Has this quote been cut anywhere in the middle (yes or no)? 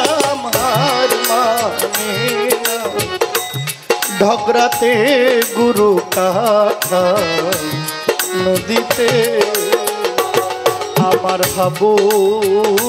no